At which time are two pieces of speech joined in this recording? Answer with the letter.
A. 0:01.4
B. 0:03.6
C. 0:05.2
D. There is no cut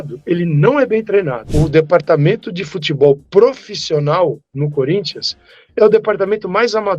A